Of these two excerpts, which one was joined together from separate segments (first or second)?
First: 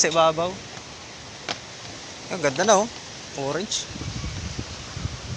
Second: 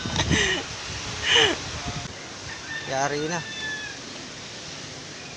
second